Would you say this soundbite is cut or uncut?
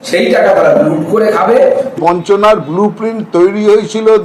cut